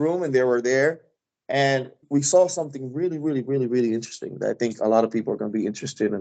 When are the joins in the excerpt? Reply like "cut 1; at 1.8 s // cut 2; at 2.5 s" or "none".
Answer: cut 1; at 2.0 s